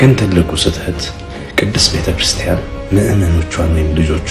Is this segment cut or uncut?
uncut